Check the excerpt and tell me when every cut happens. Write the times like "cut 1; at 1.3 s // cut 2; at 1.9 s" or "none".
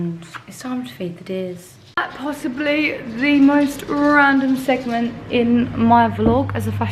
cut 1; at 2.0 s